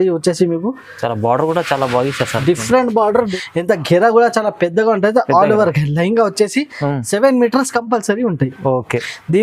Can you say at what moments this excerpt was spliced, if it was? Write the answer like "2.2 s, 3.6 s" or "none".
3.3 s